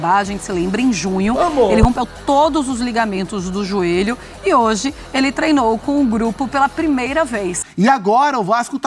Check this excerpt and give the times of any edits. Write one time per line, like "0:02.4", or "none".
0:07.6